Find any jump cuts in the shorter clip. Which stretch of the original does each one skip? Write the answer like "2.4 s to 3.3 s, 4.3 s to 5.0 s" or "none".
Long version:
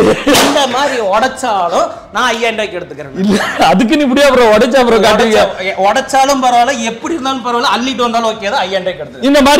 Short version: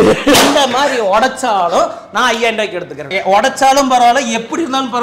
3.1 s to 5.6 s